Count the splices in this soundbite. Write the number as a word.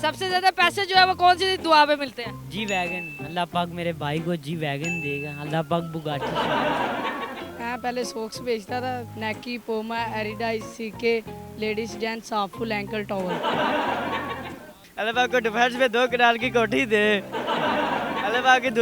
two